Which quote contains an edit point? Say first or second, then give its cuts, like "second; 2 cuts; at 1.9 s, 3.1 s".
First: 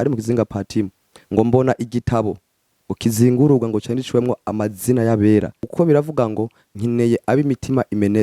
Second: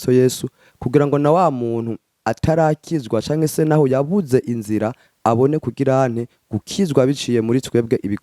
first; 1 cut; at 5.6 s